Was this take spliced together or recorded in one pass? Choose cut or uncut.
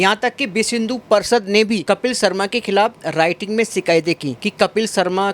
cut